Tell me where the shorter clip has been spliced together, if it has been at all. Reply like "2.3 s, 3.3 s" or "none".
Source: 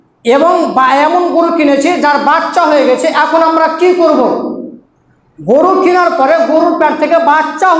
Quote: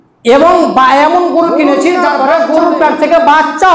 2.0 s